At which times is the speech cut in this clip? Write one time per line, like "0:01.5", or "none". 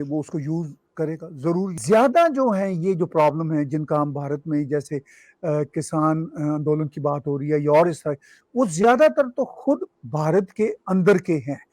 0:01.8

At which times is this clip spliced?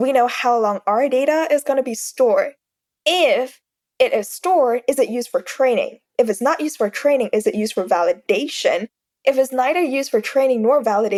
none

